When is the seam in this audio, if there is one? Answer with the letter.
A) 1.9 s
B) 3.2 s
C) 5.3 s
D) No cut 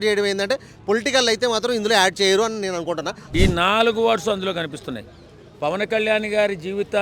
B